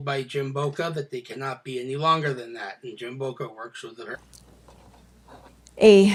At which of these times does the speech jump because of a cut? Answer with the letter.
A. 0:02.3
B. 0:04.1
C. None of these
C